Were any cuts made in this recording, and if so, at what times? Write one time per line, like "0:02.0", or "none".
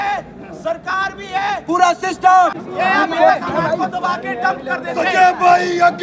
0:02.6